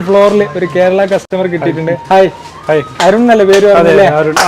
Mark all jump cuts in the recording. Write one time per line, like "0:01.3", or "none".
0:01.3